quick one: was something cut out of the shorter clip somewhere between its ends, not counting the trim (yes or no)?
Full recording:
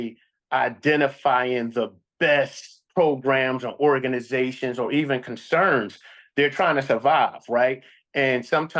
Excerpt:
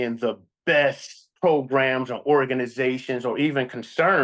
no